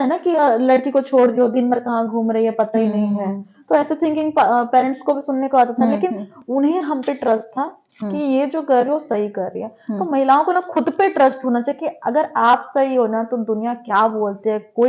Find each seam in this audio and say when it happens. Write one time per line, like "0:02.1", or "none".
none